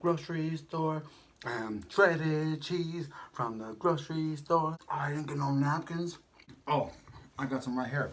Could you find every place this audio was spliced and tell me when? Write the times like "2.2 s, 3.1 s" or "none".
4.8 s, 6.6 s